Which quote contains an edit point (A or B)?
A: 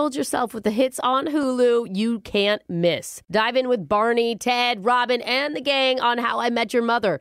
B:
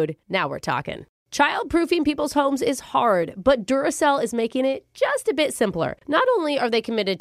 B